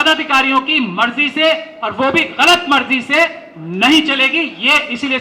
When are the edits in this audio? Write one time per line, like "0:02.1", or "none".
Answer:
none